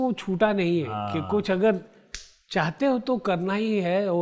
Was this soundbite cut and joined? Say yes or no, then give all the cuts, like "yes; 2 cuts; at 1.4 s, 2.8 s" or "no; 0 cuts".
no; 0 cuts